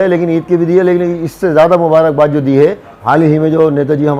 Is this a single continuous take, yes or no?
no